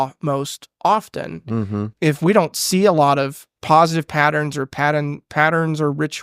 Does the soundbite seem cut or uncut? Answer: cut